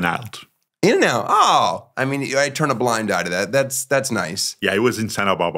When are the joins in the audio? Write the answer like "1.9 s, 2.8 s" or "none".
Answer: 1.8 s, 4.4 s